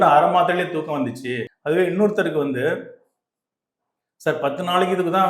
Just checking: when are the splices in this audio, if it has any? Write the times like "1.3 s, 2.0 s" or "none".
1.5 s